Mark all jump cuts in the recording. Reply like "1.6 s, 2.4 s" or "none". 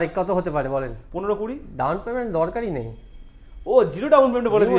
1.0 s